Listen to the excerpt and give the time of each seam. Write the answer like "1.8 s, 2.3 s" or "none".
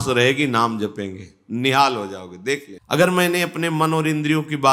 2.7 s